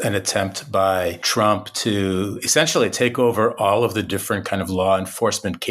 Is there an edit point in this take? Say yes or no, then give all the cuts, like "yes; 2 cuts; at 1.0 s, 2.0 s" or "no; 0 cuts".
yes; 1 cut; at 1.2 s